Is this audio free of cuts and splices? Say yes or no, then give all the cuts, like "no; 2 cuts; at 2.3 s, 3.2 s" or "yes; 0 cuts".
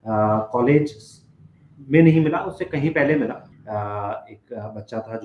no; 1 cut; at 3.5 s